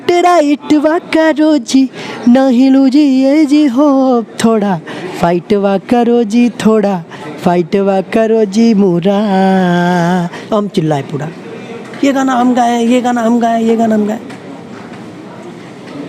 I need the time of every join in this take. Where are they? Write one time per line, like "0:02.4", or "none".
0:10.4